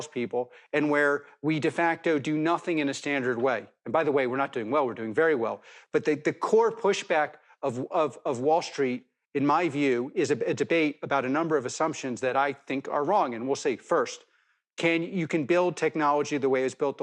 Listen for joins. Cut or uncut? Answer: uncut